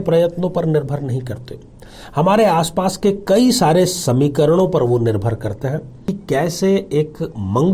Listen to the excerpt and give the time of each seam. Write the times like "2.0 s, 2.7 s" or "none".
6.1 s